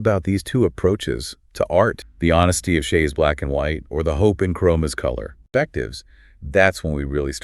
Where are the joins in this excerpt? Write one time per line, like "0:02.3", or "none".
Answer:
0:02.1
0:05.4